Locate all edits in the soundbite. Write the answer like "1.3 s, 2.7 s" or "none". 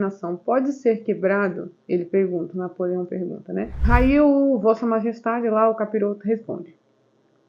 3.8 s